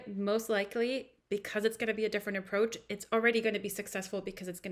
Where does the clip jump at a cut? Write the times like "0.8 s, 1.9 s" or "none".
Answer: none